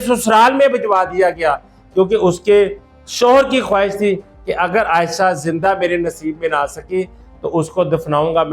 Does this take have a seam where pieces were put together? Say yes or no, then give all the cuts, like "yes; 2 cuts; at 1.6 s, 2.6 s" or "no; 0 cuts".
no; 0 cuts